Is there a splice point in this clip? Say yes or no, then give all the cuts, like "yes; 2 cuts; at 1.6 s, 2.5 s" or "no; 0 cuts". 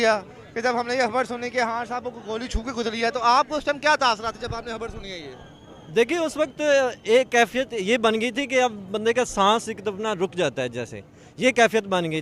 no; 0 cuts